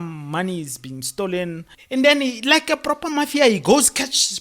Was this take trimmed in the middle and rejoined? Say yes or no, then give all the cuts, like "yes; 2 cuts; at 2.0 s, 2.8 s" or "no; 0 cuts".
yes; 1 cut; at 1.7 s